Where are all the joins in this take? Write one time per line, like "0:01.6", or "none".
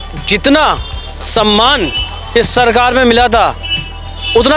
none

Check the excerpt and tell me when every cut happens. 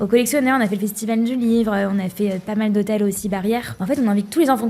0:03.7

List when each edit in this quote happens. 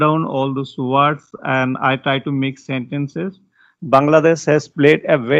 0:03.8

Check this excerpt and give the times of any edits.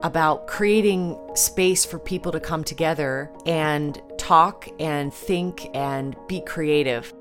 0:01.3
0:03.3
0:04.1

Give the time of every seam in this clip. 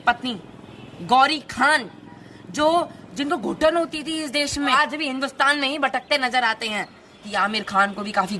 0:04.7
0:07.2

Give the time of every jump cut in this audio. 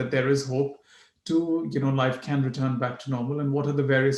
none

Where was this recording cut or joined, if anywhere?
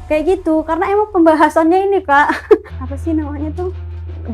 0:02.8

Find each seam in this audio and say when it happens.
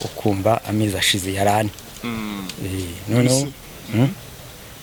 none

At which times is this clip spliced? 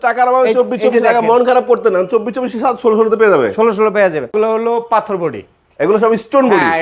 0:04.3

